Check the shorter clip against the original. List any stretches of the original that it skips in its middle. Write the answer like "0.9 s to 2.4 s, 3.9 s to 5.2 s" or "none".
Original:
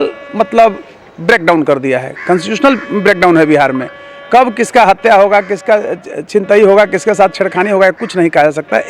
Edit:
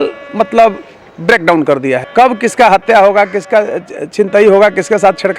2.0 s to 4.2 s